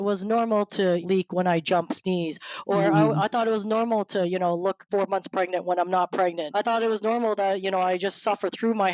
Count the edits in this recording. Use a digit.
3